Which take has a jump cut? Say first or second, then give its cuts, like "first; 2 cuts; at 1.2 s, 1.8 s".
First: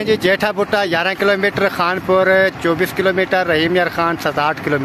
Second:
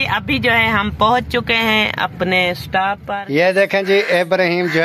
second; 1 cut; at 3.0 s